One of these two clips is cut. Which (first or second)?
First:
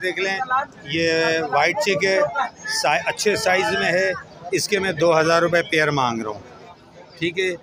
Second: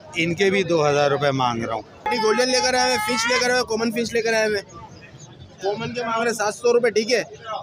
second